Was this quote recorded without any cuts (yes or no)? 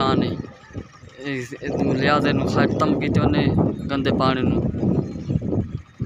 yes